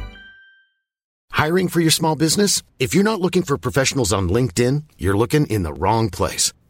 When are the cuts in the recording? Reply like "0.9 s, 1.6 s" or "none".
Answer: 1.2 s